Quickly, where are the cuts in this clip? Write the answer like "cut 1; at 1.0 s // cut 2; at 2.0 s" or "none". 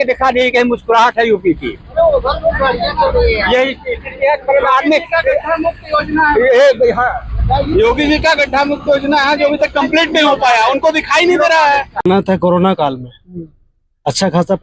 cut 1; at 12.0 s